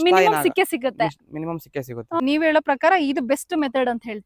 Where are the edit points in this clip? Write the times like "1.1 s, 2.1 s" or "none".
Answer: 2.2 s